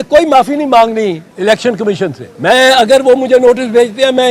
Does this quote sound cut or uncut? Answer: cut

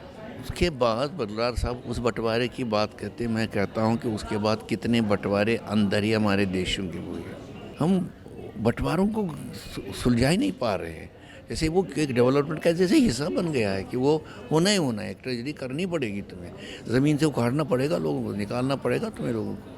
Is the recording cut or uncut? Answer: cut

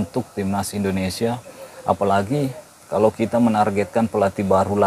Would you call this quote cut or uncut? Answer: uncut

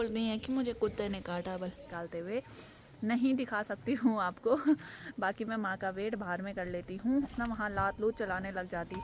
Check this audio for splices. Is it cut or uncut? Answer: cut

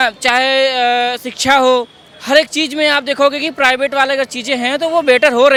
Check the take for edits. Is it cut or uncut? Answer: uncut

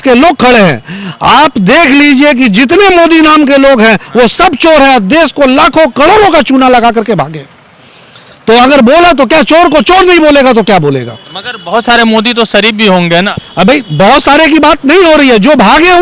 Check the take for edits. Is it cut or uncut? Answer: uncut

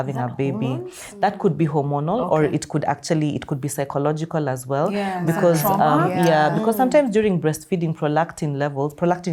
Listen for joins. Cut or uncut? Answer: uncut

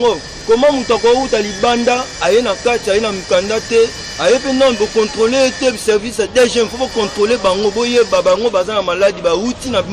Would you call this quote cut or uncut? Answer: uncut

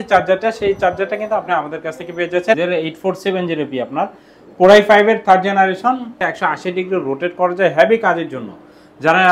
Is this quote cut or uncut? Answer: cut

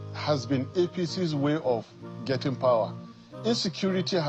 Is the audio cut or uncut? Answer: uncut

